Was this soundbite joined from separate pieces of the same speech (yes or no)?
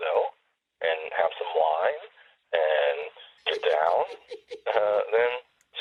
no